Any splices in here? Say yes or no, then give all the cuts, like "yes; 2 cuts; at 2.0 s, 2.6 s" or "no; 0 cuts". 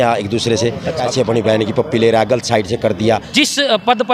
yes; 2 cuts; at 1.1 s, 3.3 s